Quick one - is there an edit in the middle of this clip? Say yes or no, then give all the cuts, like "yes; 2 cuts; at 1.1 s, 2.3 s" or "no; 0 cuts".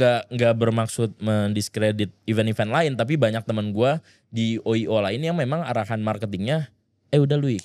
no; 0 cuts